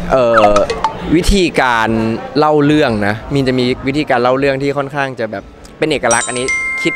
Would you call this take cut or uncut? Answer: uncut